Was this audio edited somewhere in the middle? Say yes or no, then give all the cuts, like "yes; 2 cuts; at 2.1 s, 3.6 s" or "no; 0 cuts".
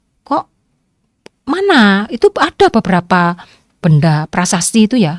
no; 0 cuts